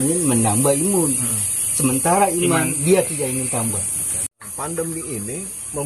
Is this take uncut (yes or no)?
no